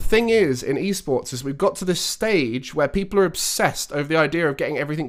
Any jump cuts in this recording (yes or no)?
no